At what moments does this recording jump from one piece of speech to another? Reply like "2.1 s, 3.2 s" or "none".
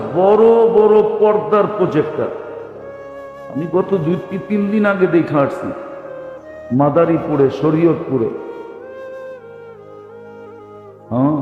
none

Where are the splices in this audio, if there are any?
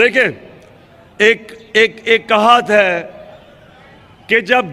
none

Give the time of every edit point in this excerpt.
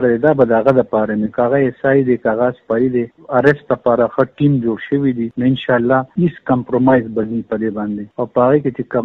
3.1 s, 5.3 s, 6.1 s, 8.0 s

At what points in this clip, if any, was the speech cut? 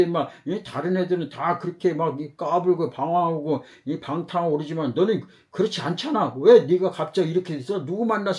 none

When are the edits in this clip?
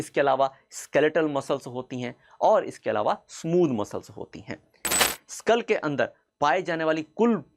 5.0 s

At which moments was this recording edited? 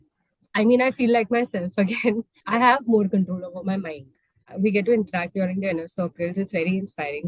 2.4 s, 4.4 s

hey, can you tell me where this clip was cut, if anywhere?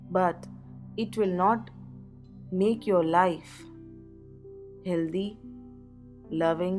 none

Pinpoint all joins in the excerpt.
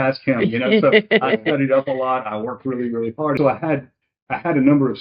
3.4 s

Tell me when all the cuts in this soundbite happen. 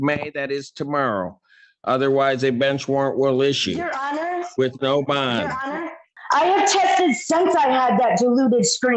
6.2 s

